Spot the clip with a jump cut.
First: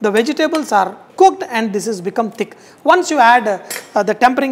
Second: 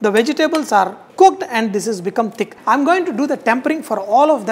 second; 1 cut; at 2.5 s

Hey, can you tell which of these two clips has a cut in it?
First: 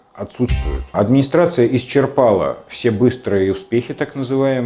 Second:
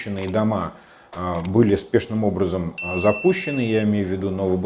first; 1 cut; at 0.9 s

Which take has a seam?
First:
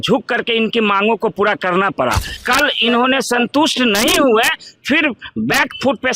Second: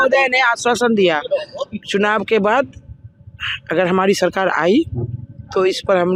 first; 1 cut; at 2.3 s

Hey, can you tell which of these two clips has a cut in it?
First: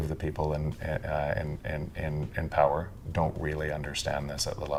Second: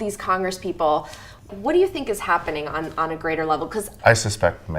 second; 2 cuts; at 1.5 s, 3.9 s

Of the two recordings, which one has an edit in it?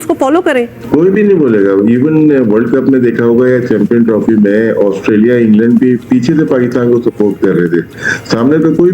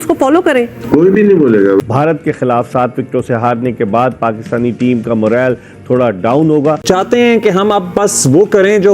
second; 2 cuts; at 1.8 s, 6.8 s

